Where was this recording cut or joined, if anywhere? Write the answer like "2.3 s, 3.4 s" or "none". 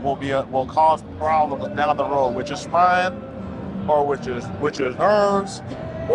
none